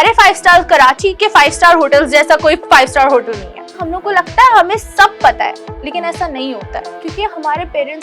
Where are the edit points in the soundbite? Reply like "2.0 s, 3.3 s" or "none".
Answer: 3.8 s, 6.8 s